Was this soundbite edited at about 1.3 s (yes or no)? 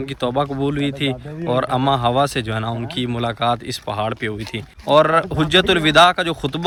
no